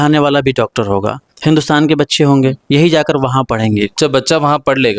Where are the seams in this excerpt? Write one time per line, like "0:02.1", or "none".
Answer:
0:03.9